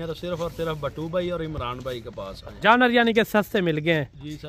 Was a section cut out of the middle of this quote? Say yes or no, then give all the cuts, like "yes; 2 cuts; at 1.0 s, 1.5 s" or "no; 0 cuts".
yes; 1 cut; at 2.4 s